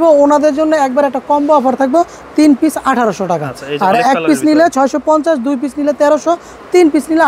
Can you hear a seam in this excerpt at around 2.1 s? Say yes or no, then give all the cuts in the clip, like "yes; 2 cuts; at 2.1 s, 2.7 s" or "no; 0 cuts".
no; 0 cuts